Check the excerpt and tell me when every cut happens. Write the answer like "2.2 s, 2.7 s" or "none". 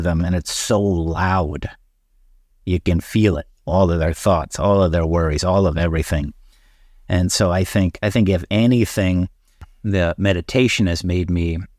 9.7 s